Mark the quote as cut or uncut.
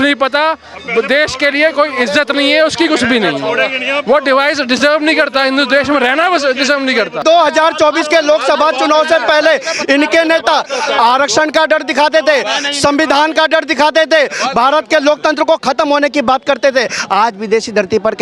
cut